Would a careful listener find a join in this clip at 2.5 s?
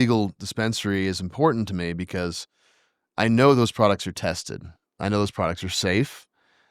no; 0 cuts

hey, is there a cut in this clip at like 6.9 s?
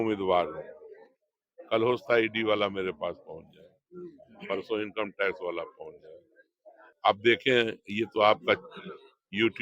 yes; 1 cut; at 6.9 s

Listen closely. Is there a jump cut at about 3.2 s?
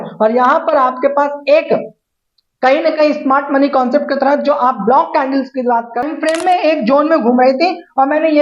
no; 1 cut; at 6.0 s

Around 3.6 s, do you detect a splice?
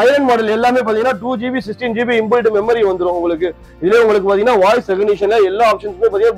yes; 1 cut; at 3.6 s

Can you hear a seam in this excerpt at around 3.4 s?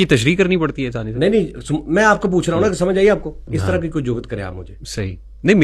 yes; 1 cut; at 3.4 s

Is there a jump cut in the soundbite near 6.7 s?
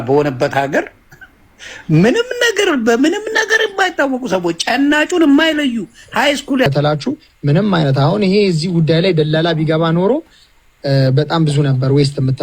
yes; 1 cut; at 6.7 s

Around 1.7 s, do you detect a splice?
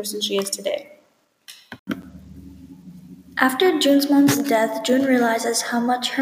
yes; 1 cut; at 1.7 s

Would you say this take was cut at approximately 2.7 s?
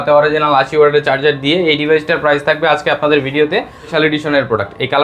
no; 1 cut; at 3.9 s

